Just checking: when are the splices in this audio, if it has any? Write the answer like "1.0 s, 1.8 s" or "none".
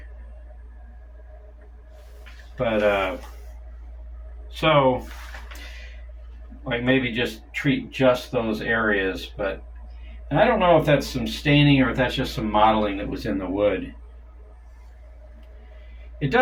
none